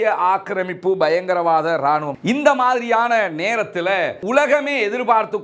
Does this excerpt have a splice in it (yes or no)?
yes